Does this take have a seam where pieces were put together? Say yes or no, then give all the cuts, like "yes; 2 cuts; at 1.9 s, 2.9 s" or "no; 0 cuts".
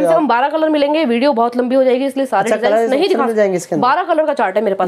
no; 0 cuts